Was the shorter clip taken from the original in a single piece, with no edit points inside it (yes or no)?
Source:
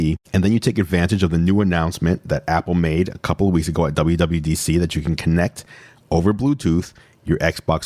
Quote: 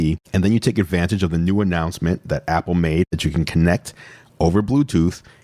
no